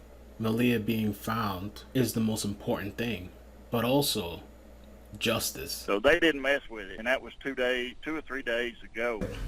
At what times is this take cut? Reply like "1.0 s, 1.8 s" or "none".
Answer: 1.7 s, 5.7 s